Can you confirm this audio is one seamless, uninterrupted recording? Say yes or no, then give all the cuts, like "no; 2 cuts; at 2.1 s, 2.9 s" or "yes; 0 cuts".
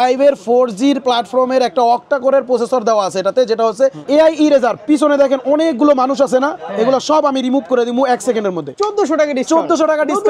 no; 2 cuts; at 4.0 s, 8.7 s